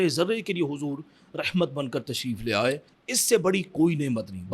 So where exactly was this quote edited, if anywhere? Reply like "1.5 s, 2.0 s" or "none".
2.9 s